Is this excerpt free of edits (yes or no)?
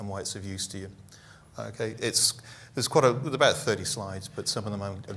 no